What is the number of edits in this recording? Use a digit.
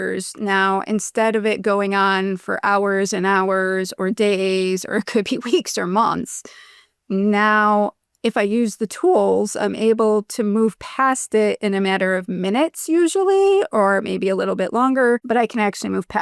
1